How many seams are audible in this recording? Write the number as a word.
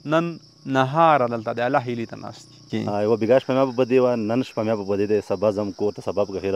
one